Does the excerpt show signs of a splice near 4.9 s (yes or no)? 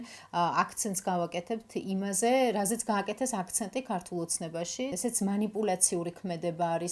yes